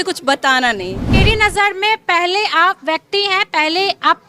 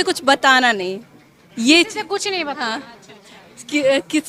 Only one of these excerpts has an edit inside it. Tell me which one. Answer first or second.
first